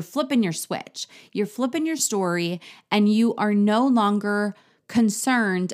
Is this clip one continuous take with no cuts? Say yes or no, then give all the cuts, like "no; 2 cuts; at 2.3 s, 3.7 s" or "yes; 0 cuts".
yes; 0 cuts